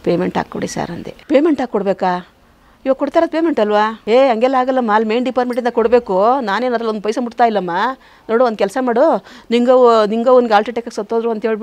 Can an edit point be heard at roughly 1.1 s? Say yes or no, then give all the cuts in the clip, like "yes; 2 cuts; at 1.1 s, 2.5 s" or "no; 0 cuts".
yes; 2 cuts; at 1.1 s, 4.0 s